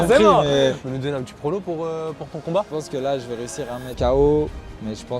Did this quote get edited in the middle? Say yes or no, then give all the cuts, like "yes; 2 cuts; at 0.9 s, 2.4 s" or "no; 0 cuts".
yes; 3 cuts; at 0.8 s, 2.7 s, 3.9 s